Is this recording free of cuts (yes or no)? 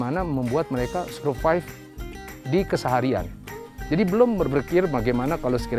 yes